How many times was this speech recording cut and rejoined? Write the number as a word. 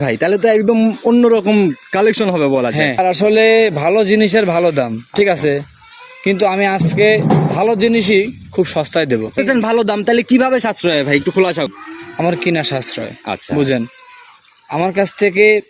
two